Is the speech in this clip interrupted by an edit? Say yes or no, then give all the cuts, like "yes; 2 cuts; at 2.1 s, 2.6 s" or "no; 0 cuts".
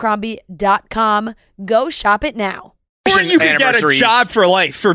yes; 1 cut; at 3.0 s